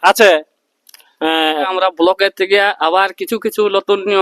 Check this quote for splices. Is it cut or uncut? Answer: cut